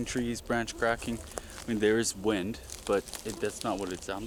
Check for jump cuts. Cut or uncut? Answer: uncut